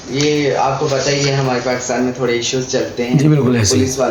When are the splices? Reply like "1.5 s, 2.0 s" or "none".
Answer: none